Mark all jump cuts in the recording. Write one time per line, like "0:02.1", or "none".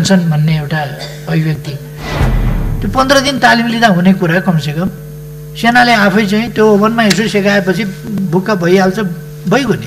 0:02.3